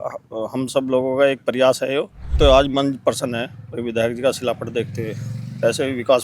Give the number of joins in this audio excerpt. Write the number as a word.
one